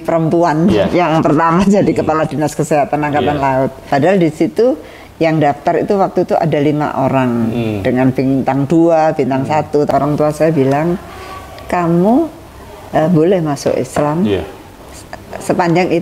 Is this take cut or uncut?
cut